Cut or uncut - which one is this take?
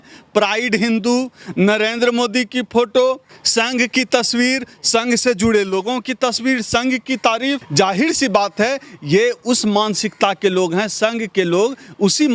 cut